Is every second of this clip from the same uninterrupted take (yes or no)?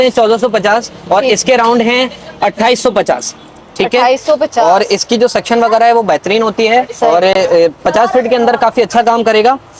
yes